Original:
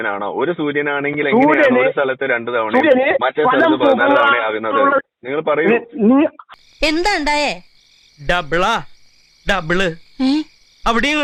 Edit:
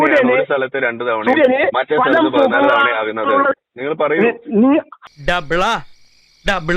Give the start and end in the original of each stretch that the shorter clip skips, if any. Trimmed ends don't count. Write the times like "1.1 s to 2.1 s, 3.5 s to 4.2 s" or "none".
6.5 s to 8.1 s